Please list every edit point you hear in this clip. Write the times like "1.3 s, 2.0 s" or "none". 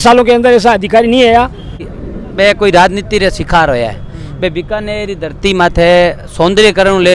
1.9 s